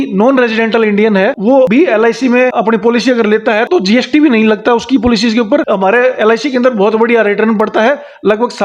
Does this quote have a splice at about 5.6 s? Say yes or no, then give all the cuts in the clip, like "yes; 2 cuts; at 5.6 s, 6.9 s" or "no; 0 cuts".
yes; 1 cut; at 5.6 s